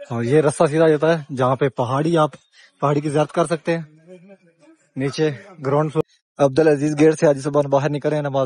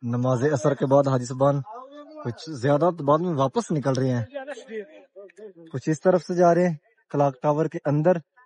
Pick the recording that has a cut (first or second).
first